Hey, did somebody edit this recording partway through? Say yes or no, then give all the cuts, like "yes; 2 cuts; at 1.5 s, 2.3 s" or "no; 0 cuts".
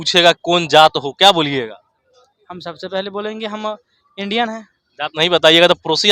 no; 0 cuts